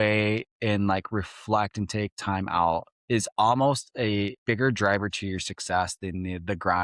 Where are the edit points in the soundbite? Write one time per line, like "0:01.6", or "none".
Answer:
0:02.9
0:04.4